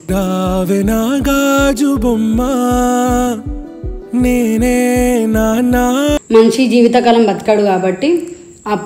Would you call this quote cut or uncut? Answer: cut